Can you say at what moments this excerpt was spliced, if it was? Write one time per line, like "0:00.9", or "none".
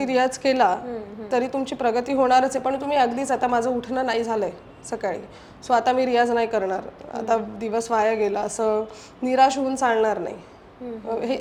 none